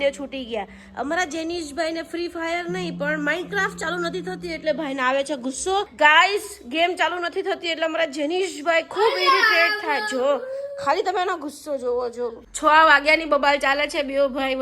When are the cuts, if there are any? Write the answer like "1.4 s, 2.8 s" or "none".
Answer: 5.9 s, 12.4 s